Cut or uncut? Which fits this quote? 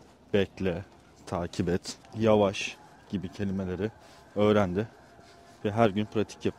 uncut